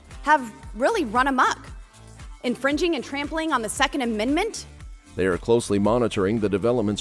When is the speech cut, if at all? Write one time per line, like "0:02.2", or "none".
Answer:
none

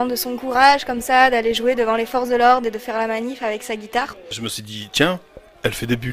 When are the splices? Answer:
0:04.4

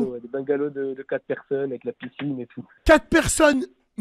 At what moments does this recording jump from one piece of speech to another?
0:02.6

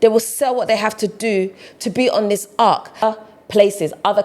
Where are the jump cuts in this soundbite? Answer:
0:03.0

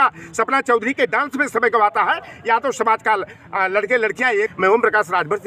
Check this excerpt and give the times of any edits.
0:04.5

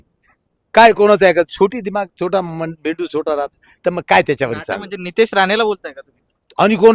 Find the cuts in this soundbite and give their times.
none

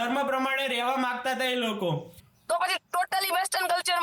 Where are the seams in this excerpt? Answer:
0:02.3

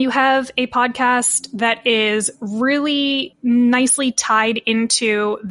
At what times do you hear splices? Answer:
none

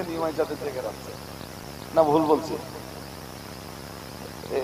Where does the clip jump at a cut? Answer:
0:01.6

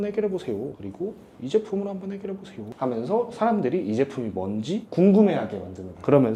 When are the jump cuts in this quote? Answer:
none

